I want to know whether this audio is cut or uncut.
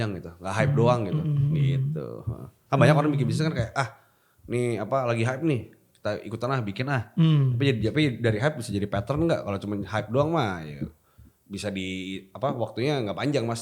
uncut